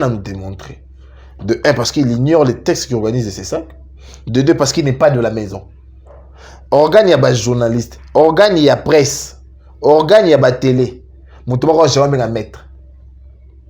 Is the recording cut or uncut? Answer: uncut